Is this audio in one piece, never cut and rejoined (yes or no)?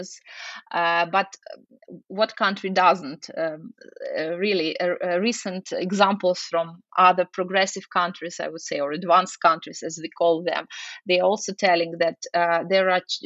yes